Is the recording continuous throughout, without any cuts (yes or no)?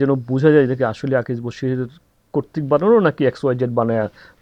yes